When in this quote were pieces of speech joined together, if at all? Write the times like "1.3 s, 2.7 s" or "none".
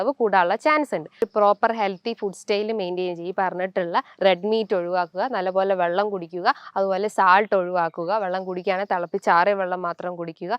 1.2 s